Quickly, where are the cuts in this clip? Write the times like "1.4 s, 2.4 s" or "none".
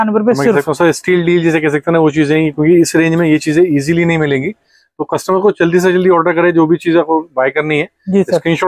none